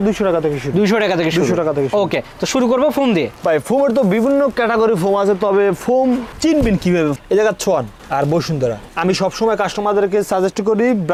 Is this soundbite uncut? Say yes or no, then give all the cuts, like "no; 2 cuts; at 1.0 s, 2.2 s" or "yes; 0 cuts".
yes; 0 cuts